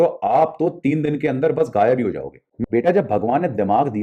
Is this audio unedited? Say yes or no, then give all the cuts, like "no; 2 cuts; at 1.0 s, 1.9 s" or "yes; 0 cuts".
no; 1 cut; at 2.6 s